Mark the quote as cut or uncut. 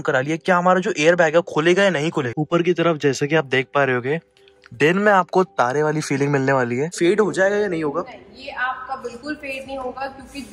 cut